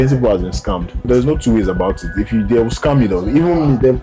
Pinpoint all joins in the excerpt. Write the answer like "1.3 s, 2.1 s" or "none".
0.9 s